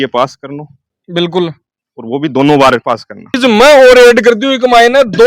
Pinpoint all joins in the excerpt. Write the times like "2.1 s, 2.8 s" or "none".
3.4 s